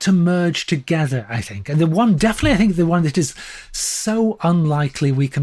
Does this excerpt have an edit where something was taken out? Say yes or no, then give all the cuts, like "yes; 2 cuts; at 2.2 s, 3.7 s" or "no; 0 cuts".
no; 0 cuts